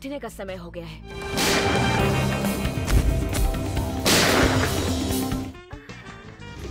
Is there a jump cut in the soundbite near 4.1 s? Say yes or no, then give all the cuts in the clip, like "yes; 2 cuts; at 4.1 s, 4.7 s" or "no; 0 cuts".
no; 1 cut; at 1.7 s